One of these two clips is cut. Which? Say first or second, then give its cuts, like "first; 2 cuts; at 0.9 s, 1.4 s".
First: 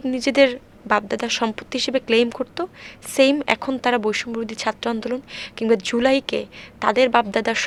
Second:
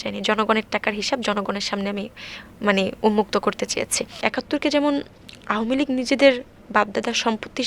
second; 1 cut; at 4.1 s